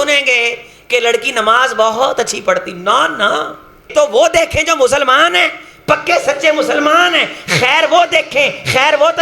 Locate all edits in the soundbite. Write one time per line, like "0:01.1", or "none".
0:03.9